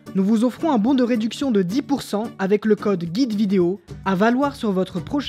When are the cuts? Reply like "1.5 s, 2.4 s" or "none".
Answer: 3.9 s